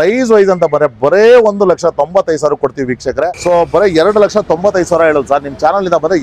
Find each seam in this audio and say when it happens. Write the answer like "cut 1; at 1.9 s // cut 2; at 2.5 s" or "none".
cut 1; at 3.3 s